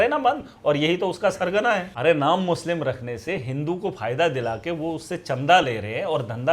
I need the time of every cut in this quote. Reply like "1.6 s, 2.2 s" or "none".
1.9 s